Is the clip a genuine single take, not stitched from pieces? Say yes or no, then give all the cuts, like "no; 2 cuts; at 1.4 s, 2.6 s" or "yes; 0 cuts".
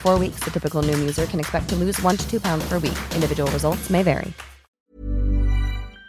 no; 1 cut; at 4.6 s